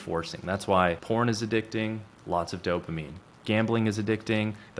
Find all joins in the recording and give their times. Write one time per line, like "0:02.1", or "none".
0:01.0